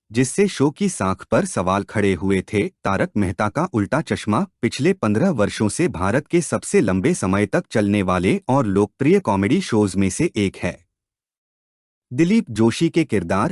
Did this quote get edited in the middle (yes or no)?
yes